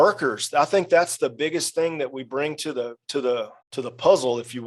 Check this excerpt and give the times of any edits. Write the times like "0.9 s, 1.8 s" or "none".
3.6 s